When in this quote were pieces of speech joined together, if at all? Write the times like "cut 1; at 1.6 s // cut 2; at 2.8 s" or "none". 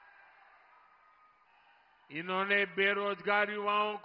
cut 1; at 1.5 s